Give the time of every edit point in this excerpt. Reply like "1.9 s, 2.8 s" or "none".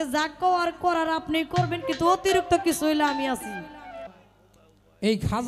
4.1 s